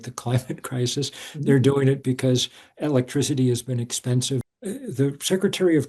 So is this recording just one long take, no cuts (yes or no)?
no